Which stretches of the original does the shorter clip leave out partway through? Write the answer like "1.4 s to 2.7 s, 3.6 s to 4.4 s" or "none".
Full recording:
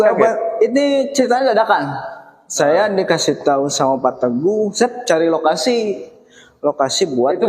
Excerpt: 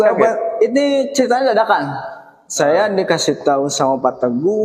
none